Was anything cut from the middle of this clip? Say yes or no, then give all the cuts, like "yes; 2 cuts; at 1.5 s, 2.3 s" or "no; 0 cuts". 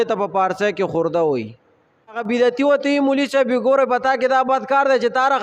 yes; 1 cut; at 2.2 s